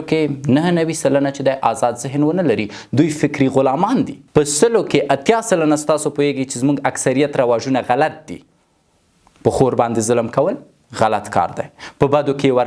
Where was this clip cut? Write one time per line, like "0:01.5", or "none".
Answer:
0:04.2